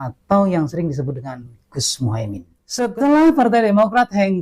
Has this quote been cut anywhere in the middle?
yes; 1 cut; at 2.6 s

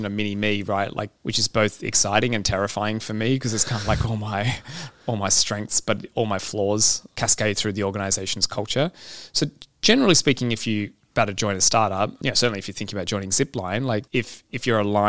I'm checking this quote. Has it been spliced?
yes; 5 cuts; at 1.2 s, 7.0 s, 11.0 s, 12.2 s, 14.1 s

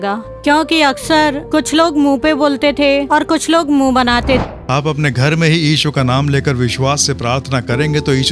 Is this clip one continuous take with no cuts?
no; 1 cut; at 4.4 s

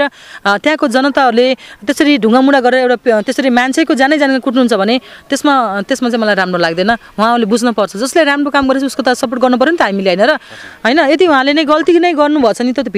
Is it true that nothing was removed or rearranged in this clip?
yes; 0 cuts

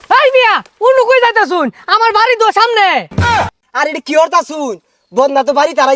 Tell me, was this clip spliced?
no; 0 cuts

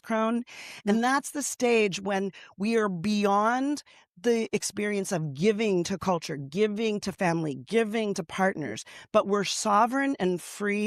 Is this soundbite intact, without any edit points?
yes; 0 cuts

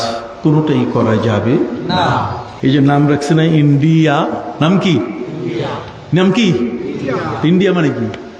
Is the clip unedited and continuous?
no; 1 cut; at 2.5 s

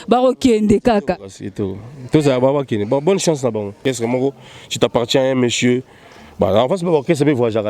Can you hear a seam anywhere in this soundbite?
yes; 1 cut; at 3.8 s

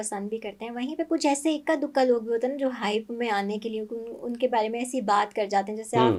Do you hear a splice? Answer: no; 0 cuts

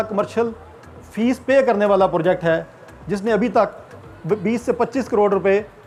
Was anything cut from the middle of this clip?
no; 0 cuts

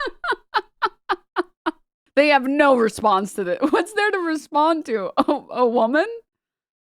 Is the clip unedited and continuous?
no; 1 cut; at 1.9 s

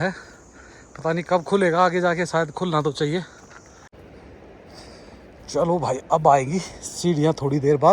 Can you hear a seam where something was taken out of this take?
yes; 1 cut; at 3.9 s

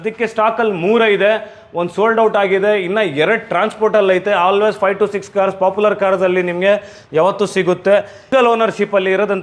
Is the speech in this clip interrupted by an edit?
yes; 1 cut; at 8.3 s

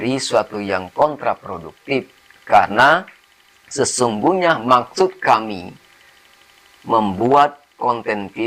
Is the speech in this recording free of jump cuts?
yes; 0 cuts

